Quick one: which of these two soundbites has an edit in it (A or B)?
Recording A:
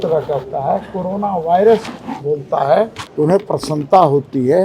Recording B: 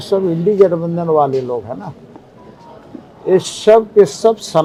A